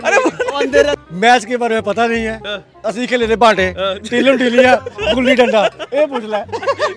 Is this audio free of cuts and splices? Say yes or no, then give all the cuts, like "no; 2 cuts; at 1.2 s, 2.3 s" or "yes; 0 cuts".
no; 1 cut; at 0.9 s